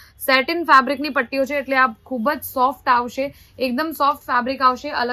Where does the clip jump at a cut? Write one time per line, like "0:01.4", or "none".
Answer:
none